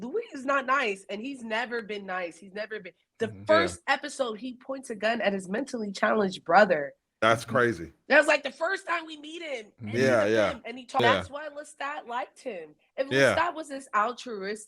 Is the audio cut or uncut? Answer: cut